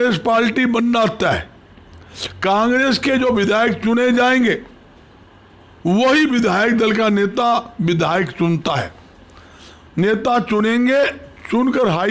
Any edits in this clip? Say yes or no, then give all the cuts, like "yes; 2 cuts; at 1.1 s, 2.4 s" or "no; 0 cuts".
no; 0 cuts